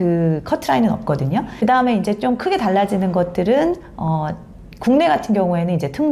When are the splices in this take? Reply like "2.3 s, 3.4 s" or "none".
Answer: 1.5 s

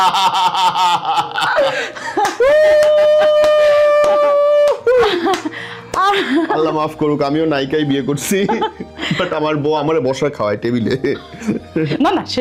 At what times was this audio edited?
none

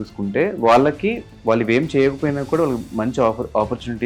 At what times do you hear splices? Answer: none

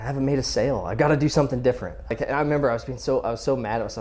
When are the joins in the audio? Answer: 1.9 s

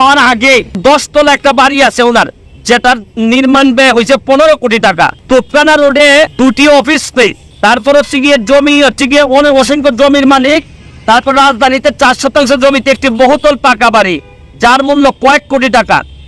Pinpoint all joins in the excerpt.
0.8 s, 5.2 s, 6.3 s, 7.4 s

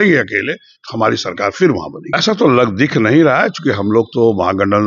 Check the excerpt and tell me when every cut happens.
2.0 s

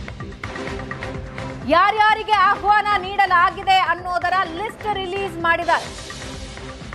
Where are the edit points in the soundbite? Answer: none

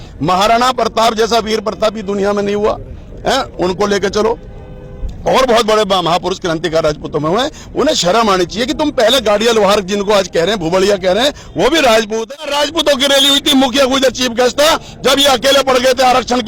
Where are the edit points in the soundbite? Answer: 12.4 s

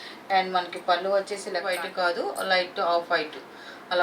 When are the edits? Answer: 1.7 s

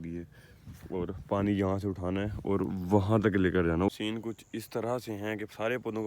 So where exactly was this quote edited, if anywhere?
3.9 s

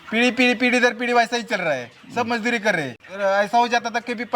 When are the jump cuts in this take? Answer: 3.1 s

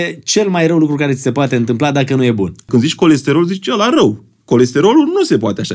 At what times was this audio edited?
2.7 s

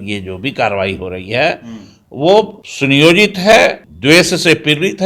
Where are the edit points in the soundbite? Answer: 2.6 s, 3.9 s

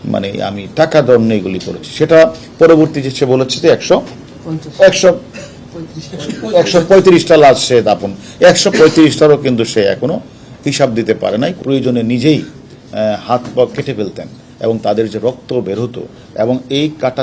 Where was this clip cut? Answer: 11.6 s

